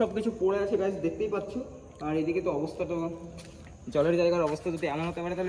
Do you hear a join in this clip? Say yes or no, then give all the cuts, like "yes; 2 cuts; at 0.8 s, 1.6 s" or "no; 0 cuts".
no; 0 cuts